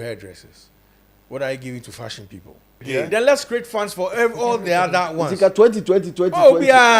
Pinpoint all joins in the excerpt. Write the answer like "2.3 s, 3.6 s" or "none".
2.8 s